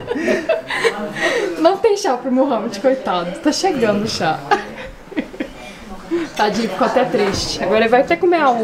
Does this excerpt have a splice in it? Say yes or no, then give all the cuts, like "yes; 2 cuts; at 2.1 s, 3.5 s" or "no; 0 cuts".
no; 0 cuts